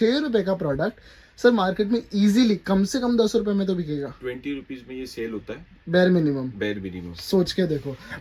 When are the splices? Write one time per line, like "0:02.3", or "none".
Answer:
none